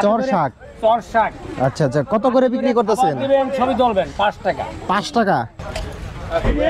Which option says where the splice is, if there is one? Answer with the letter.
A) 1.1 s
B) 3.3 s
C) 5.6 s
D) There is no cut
C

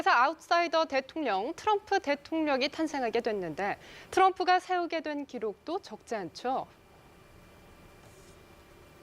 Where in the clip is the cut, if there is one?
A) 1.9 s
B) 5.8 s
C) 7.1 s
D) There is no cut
B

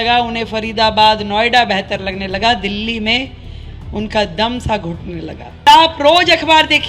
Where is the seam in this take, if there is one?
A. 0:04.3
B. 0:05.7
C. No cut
B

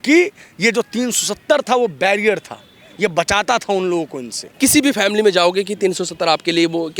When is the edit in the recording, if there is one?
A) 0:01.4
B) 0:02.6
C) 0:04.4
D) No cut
C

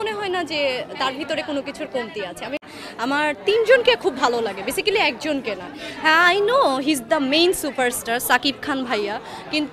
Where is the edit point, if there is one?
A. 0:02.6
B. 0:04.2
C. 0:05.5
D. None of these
A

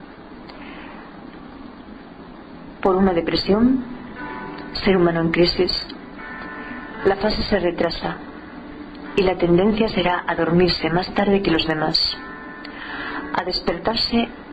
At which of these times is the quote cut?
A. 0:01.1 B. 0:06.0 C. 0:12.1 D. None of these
D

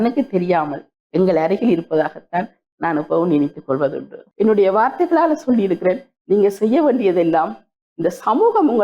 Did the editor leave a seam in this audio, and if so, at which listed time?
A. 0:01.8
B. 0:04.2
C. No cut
B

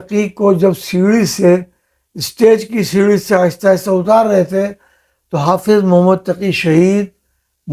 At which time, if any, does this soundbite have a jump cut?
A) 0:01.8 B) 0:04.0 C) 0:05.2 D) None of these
D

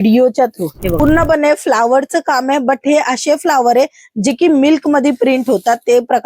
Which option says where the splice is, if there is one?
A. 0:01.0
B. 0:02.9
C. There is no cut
A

